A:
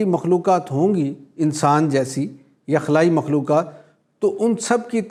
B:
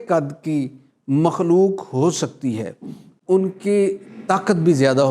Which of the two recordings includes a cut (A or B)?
B